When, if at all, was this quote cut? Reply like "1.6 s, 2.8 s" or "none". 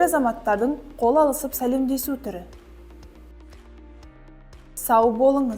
2.5 s, 4.5 s